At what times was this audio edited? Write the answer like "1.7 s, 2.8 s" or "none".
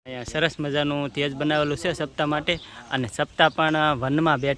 none